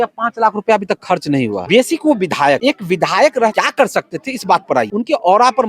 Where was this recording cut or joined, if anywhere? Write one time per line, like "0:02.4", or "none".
0:01.6
0:02.6
0:03.5
0:04.9